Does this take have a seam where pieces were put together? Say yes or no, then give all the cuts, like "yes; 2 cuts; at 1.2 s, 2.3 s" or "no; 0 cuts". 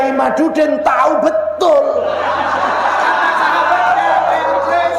no; 0 cuts